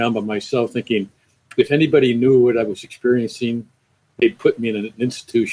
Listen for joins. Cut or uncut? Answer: uncut